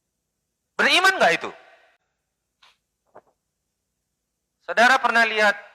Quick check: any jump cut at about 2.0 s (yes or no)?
yes